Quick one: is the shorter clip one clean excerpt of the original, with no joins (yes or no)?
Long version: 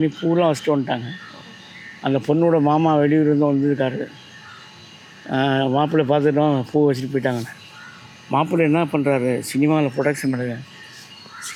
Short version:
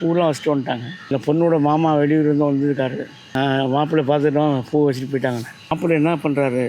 no